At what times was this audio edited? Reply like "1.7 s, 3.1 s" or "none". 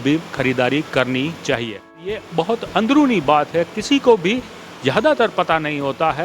2.1 s